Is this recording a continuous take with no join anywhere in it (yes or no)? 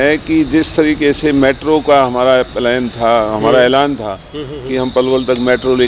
yes